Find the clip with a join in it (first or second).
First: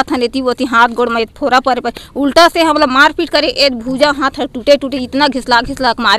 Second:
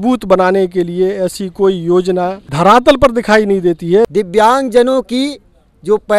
second